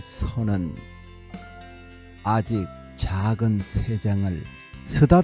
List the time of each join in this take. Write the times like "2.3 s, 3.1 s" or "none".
0.8 s, 2.2 s

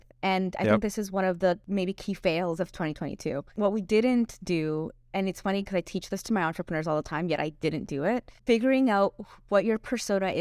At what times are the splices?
1.6 s, 3.5 s, 8.3 s

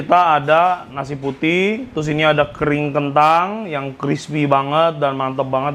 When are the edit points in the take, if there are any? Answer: none

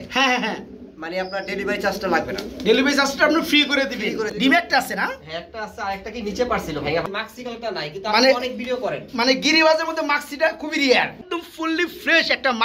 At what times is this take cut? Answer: 4.3 s, 7.1 s, 11.2 s

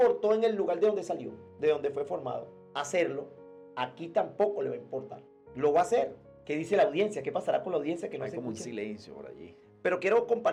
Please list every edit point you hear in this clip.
none

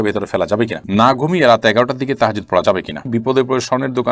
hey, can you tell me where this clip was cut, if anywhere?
0.8 s, 3.1 s

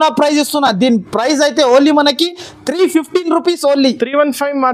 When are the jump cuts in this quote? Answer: none

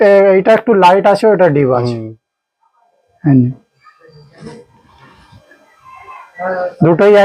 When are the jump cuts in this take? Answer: none

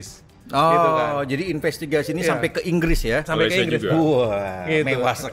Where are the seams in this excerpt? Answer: none

